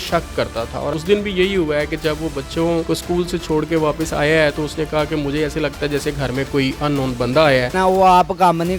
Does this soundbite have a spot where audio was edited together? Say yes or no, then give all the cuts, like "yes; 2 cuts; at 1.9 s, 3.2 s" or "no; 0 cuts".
yes; 3 cuts; at 0.9 s, 2.9 s, 7.7 s